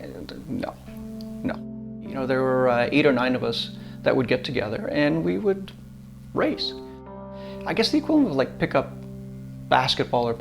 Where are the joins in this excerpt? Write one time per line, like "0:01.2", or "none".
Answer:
0:02.1
0:07.1